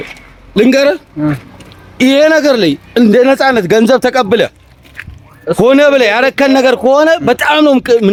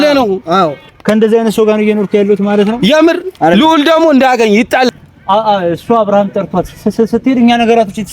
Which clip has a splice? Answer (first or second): second